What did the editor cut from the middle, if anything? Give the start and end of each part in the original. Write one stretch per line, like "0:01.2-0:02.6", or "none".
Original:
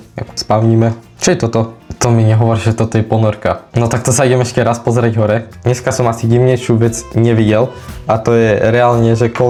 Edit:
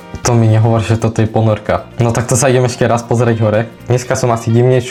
none